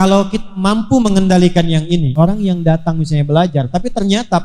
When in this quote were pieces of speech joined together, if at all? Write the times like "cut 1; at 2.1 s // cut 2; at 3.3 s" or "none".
cut 1; at 2.1 s